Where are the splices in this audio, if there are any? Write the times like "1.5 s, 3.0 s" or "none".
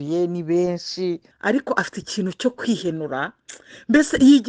1.3 s